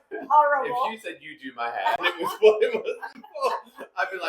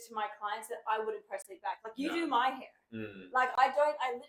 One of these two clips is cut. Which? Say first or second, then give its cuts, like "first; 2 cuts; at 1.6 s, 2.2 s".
first; 1 cut; at 2.0 s